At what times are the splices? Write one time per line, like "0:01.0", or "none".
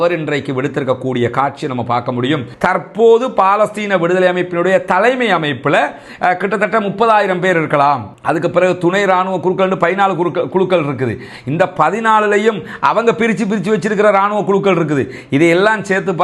0:02.5